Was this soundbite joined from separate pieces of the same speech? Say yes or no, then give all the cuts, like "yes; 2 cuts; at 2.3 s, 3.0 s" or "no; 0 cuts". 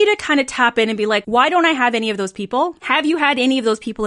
yes; 2 cuts; at 1.2 s, 2.8 s